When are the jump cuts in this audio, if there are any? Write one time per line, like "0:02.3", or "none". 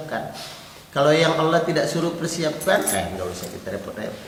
none